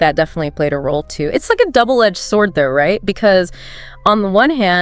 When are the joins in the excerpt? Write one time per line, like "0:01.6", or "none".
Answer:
none